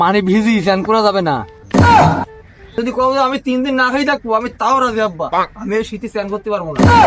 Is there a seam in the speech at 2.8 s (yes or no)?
yes